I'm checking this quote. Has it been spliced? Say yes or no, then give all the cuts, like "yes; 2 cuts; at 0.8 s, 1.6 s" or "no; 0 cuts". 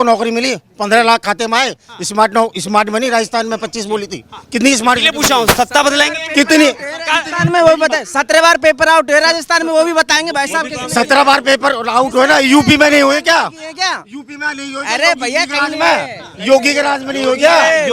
no; 0 cuts